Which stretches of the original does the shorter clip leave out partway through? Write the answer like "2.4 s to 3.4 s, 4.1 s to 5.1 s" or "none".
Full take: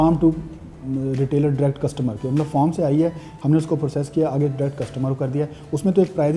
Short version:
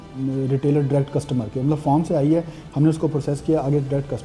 none